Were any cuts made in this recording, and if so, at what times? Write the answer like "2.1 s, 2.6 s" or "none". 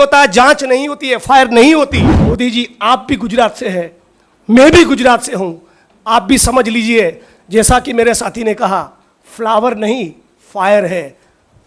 2.1 s